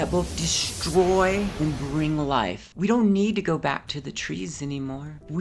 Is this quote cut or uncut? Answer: cut